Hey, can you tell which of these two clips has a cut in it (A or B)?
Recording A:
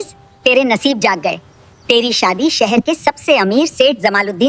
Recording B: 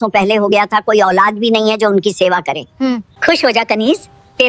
B